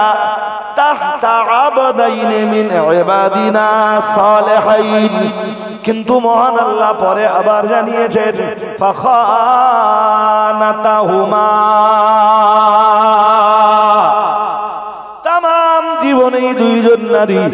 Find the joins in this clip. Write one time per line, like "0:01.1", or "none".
none